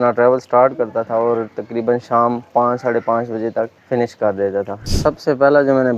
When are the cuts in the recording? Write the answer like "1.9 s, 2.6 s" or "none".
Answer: 3.8 s, 4.9 s